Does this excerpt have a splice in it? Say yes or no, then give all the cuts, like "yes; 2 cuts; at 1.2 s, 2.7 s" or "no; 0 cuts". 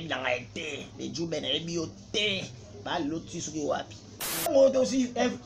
yes; 1 cut; at 4.5 s